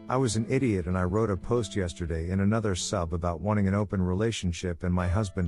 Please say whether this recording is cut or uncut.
uncut